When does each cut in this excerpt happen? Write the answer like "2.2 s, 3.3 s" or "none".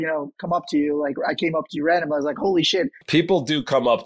3.0 s